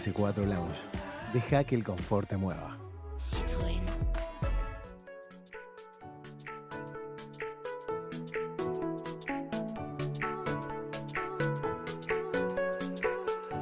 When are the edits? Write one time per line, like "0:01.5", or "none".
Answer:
0:04.8